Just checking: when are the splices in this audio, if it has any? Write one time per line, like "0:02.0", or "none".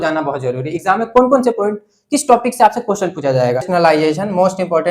0:03.7